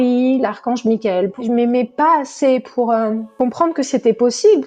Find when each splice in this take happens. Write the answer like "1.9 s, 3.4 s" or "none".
1.4 s, 3.3 s